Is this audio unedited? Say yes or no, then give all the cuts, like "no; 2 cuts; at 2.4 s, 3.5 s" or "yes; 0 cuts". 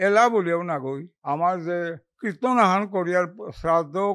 no; 2 cuts; at 1.1 s, 2.1 s